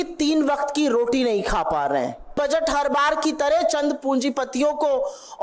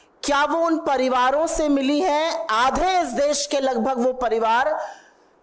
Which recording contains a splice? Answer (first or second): first